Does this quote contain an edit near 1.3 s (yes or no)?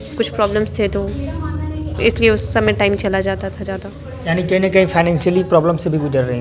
no